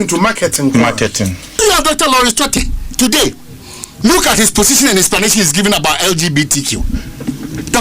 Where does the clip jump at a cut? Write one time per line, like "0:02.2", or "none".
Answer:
0:01.6